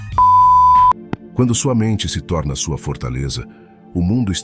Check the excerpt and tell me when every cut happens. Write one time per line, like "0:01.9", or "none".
0:01.2